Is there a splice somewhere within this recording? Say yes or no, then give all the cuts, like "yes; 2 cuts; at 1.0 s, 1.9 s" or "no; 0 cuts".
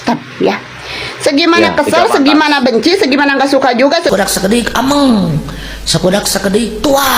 yes; 1 cut; at 4.1 s